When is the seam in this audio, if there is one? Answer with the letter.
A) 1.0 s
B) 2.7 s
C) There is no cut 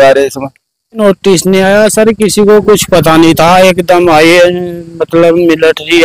A